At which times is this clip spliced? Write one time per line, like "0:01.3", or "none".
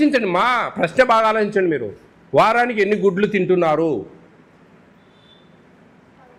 none